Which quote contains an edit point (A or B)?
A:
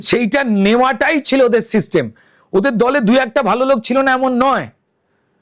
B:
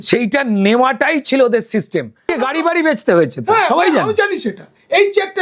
B